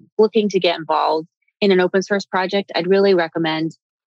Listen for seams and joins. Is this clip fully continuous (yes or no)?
yes